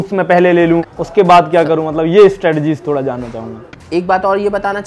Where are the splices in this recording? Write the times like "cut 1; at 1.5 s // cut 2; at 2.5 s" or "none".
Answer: cut 1; at 1.0 s // cut 2; at 3.7 s